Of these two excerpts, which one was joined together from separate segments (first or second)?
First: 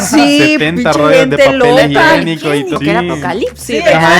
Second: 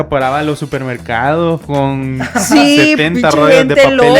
first